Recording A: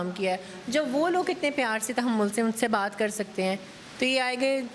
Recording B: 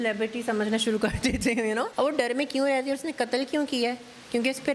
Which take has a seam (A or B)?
B